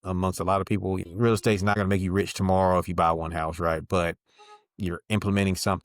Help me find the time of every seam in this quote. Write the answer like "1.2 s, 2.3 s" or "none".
1.0 s, 1.8 s